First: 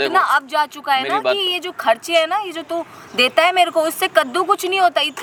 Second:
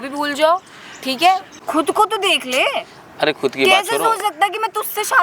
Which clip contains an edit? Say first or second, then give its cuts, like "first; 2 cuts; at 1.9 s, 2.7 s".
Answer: second; 1 cut; at 1.5 s